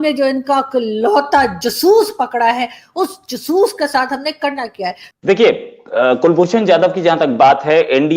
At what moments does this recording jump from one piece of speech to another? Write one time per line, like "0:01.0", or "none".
0:05.1